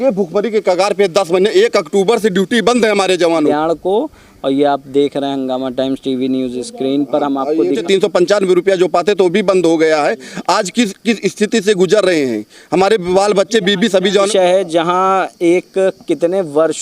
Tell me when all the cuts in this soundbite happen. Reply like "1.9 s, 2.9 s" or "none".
3.5 s, 7.8 s, 14.3 s

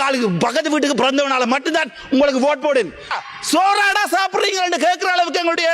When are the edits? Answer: 3.1 s

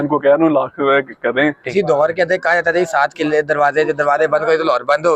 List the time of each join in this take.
1.6 s

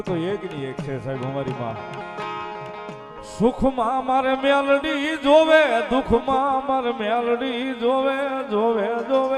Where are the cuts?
2.9 s

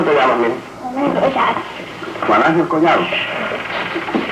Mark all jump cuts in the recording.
2.8 s

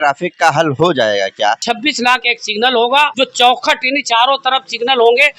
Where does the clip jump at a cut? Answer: 1.6 s, 3.1 s

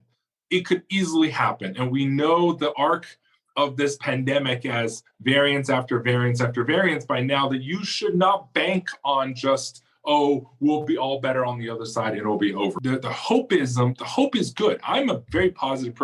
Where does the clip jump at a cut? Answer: 12.8 s

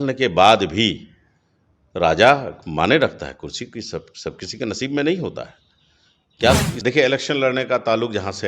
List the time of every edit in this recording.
6.7 s

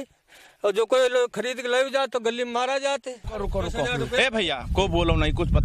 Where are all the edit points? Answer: 3.4 s

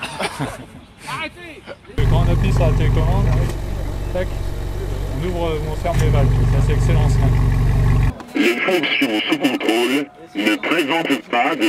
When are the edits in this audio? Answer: 2.0 s, 8.1 s

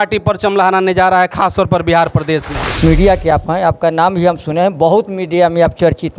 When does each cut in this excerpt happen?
2.6 s

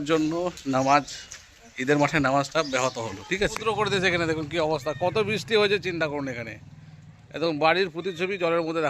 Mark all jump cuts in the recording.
3.6 s

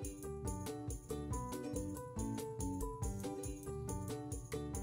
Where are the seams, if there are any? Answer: none

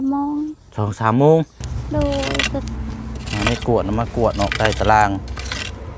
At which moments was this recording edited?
2.6 s

